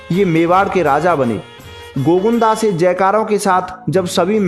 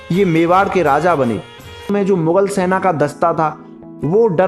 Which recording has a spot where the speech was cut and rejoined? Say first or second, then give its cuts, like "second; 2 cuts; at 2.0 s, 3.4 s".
second; 1 cut; at 1.8 s